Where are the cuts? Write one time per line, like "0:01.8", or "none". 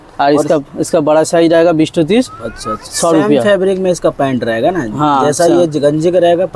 none